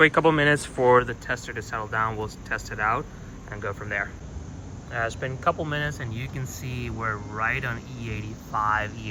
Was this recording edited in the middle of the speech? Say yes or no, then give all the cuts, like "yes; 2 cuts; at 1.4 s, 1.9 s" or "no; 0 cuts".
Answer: no; 0 cuts